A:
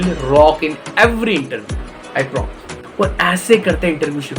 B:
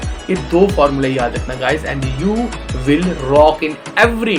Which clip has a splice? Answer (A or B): A